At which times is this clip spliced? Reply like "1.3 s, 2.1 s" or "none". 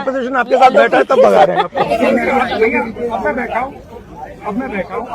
1.9 s

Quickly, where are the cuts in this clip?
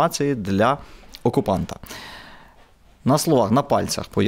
none

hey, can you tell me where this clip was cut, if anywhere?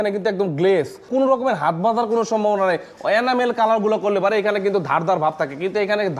1.1 s

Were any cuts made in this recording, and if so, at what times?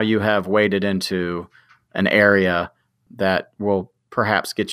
3.0 s

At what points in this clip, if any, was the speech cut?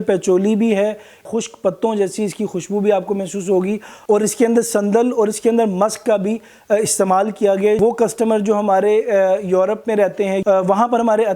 1.3 s, 7.8 s, 10.4 s

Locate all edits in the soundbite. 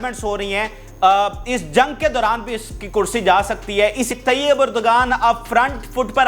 4.0 s

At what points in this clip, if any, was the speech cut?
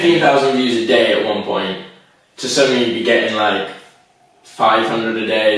none

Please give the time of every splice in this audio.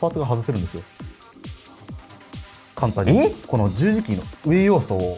3.4 s

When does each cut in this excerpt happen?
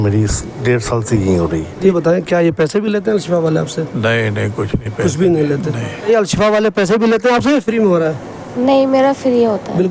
1.7 s, 6.0 s

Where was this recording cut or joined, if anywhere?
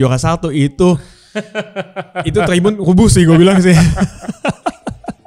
none

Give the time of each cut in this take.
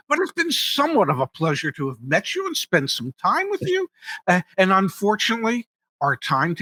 none

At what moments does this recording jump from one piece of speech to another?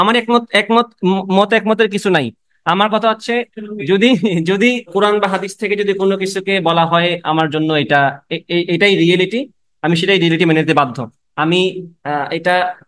4.9 s

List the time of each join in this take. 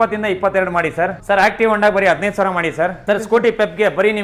1.2 s, 3.0 s

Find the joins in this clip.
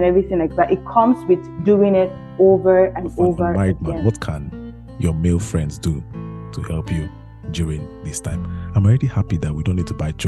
3.5 s

